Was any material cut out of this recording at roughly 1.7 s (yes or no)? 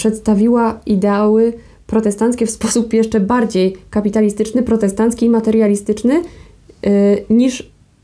no